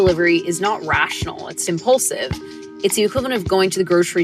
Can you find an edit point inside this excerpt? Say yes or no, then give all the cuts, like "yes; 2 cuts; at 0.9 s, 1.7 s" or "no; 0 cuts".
yes; 1 cut; at 2.6 s